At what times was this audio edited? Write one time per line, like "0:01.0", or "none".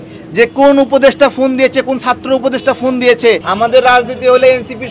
0:03.5